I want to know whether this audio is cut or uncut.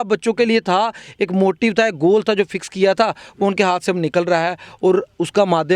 uncut